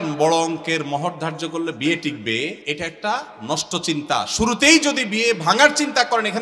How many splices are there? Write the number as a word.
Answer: one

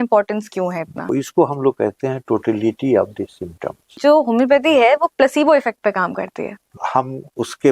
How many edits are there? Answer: three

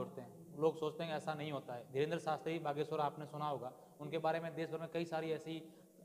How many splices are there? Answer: zero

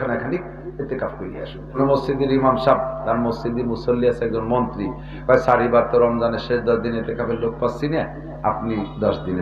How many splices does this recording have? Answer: one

